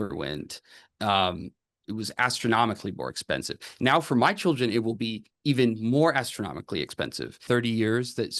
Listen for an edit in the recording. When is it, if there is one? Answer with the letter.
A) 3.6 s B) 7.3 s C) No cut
B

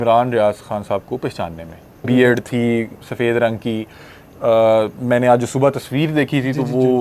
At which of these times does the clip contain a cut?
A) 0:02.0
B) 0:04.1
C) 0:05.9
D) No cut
A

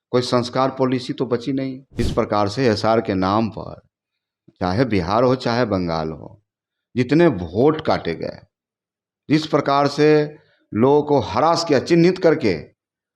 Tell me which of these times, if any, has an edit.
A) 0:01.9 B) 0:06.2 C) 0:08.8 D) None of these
A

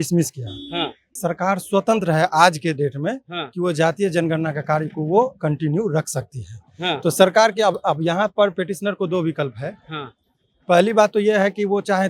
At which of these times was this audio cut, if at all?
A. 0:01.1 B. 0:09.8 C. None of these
A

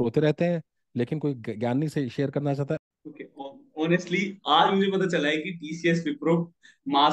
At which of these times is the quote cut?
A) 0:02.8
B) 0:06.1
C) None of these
A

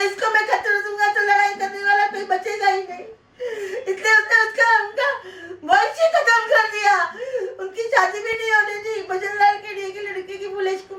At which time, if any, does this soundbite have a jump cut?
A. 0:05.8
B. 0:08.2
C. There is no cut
C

